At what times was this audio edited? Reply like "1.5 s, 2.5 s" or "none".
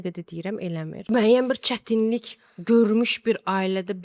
1.1 s

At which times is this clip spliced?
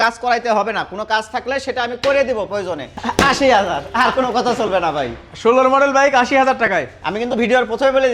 2.9 s

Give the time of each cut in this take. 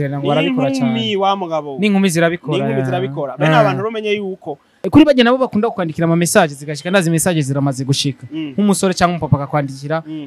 4.7 s

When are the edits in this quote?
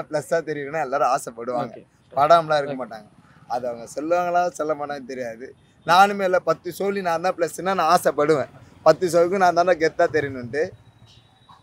none

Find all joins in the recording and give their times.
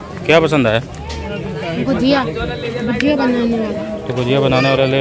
none

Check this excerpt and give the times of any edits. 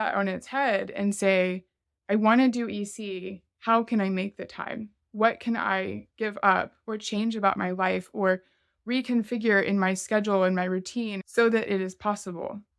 11.2 s

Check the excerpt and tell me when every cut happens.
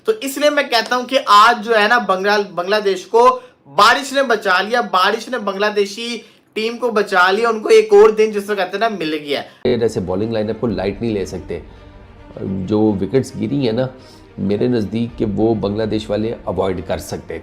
9.7 s

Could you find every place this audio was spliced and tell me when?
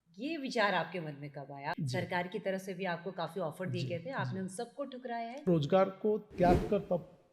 1.8 s, 5.5 s

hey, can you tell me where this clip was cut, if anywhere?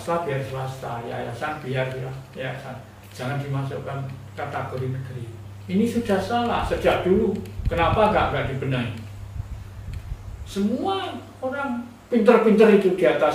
none

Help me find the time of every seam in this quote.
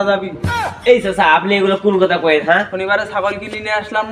2.7 s

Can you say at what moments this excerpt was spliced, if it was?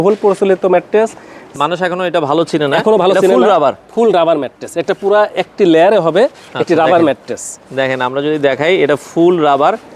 1.4 s

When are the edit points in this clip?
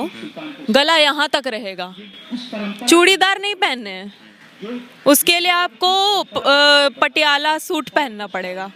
none

